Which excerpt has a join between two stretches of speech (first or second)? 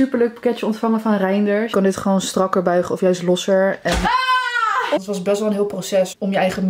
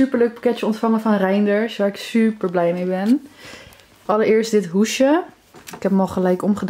first